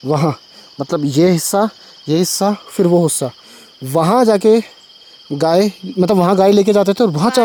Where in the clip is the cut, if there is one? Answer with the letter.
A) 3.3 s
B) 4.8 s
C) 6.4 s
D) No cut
D